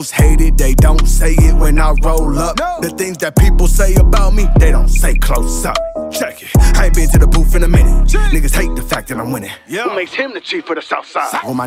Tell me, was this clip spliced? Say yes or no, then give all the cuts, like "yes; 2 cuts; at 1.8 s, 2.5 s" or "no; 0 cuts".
no; 0 cuts